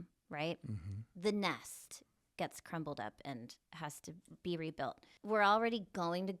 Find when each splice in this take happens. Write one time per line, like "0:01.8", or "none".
0:05.1